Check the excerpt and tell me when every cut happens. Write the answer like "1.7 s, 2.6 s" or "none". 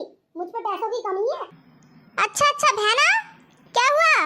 1.5 s